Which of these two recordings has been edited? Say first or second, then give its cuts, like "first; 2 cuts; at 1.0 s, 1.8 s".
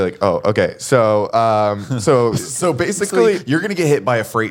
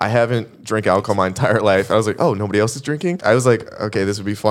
second; 1 cut; at 3.2 s